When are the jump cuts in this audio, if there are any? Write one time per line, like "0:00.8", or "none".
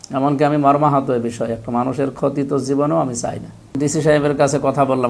0:03.7